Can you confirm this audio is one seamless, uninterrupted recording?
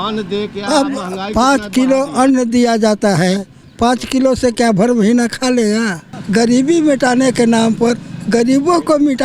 no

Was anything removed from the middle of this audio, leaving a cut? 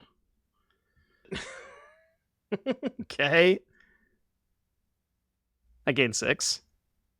yes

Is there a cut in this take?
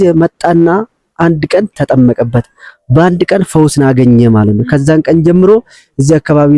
no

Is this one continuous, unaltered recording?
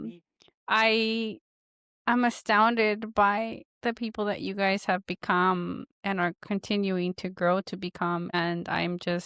no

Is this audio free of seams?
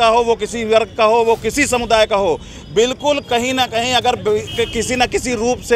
yes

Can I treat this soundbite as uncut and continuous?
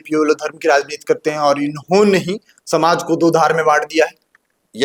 yes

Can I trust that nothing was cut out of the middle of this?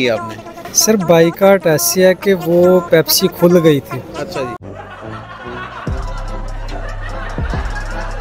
yes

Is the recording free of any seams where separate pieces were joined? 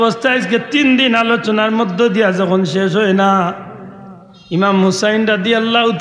yes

